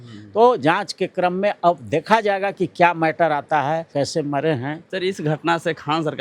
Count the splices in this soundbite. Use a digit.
1